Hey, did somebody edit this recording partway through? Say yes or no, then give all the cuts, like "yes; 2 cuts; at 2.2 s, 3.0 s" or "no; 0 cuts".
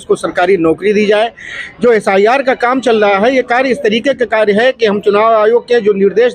no; 0 cuts